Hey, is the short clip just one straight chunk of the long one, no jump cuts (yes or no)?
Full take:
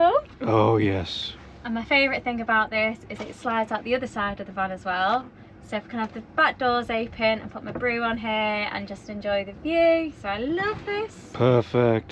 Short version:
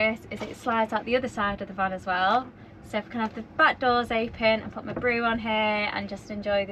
yes